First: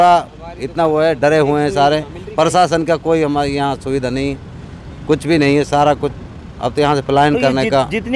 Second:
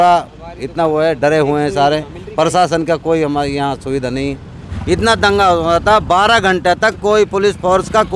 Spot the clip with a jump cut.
second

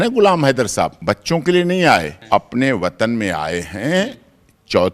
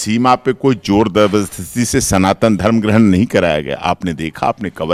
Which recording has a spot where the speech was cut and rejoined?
first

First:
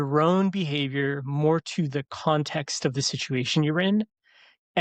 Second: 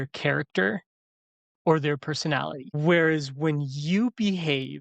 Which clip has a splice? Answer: second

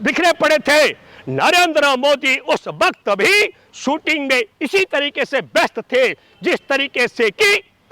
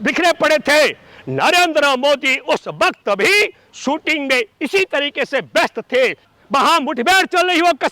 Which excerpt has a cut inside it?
second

